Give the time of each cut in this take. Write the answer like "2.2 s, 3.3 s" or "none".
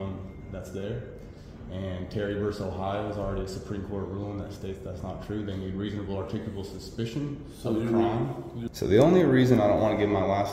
8.5 s